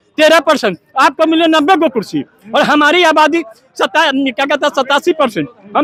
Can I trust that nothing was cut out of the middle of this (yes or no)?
yes